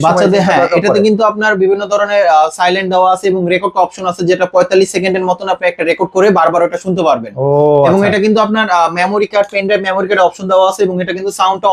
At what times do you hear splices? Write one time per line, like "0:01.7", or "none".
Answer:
none